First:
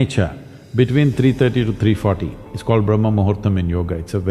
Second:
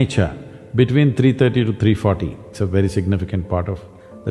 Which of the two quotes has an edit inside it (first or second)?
second